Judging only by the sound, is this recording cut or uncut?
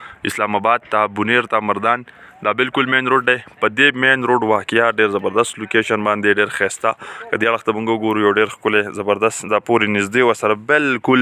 uncut